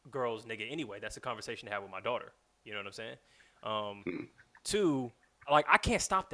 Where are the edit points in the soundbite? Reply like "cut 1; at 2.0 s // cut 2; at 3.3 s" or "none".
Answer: cut 1; at 5.4 s